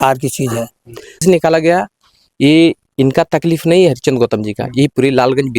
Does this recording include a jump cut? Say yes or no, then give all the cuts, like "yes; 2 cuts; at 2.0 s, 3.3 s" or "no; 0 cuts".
yes; 1 cut; at 1.1 s